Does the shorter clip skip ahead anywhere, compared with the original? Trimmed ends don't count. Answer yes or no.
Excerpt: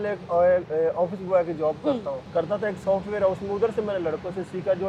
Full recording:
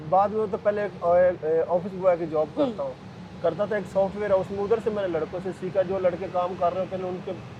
yes